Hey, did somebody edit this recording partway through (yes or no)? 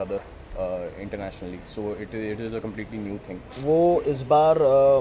yes